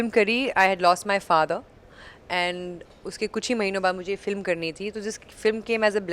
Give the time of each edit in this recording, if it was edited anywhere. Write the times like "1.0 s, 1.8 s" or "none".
none